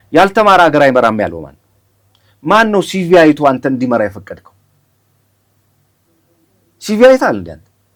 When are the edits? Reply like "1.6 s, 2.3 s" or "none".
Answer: none

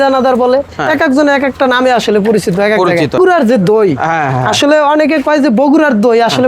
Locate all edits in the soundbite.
3.1 s

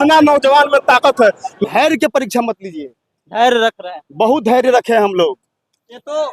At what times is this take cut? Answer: 1.5 s

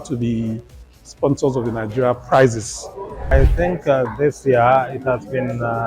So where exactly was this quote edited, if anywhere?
3.3 s

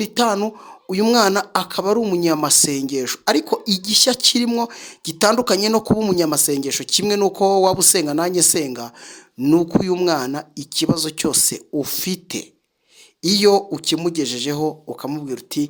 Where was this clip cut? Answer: none

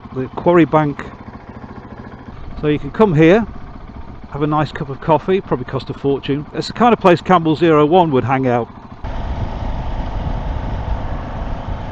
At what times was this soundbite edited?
2.3 s, 9.0 s

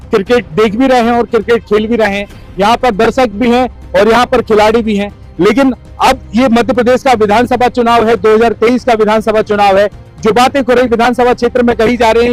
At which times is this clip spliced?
none

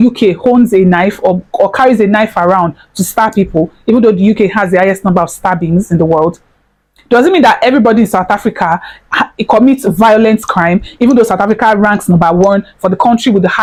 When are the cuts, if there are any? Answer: none

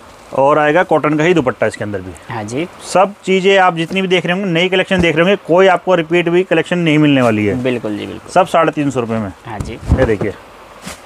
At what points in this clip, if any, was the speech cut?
none

